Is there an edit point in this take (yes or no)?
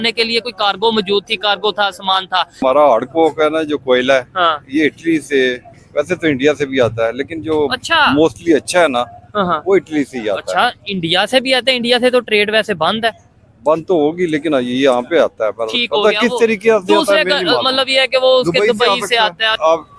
no